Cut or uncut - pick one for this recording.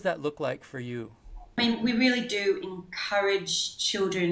cut